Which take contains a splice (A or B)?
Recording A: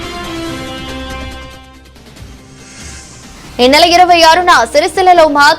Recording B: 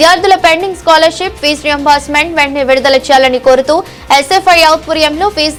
A